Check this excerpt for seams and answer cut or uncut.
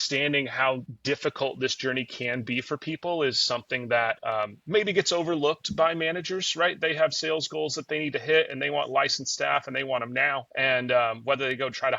cut